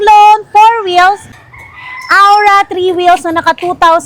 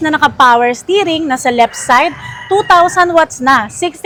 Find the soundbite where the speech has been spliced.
first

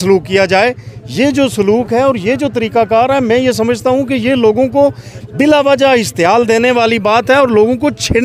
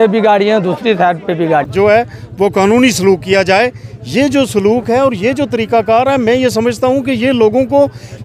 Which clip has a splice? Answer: second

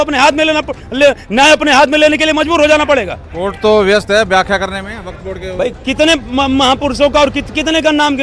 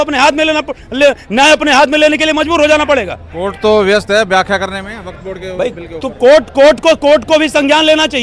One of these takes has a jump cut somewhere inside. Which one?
first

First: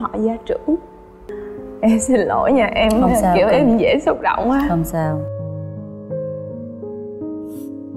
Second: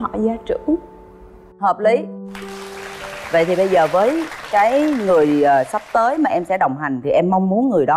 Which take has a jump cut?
first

